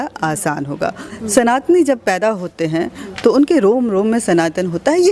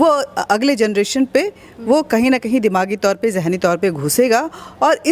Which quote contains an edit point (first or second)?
first